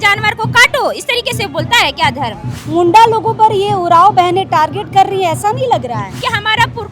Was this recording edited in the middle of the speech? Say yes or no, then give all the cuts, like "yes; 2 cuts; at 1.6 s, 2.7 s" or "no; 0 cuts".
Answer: yes; 2 cuts; at 2.6 s, 6.2 s